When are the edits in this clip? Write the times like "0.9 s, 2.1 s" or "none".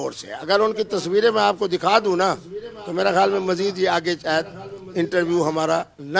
none